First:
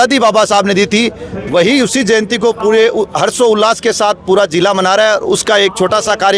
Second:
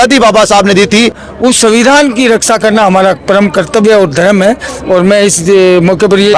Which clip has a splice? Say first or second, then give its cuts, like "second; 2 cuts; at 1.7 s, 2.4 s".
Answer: second; 1 cut; at 1.2 s